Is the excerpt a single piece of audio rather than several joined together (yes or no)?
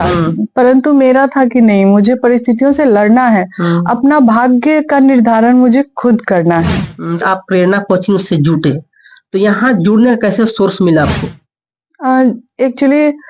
no